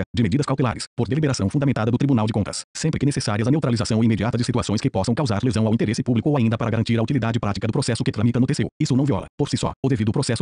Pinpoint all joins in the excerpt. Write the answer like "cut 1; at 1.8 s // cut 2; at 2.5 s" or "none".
cut 1; at 9.0 s